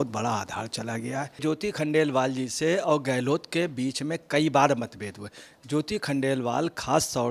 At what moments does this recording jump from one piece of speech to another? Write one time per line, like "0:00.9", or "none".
0:01.4